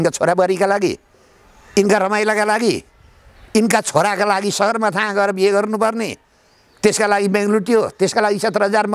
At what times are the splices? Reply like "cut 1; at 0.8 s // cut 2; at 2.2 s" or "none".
none